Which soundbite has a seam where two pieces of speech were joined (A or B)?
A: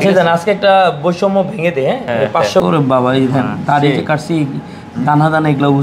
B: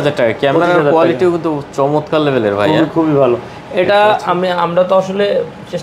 A